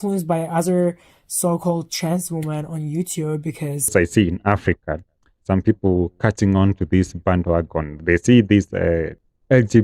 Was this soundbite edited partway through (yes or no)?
yes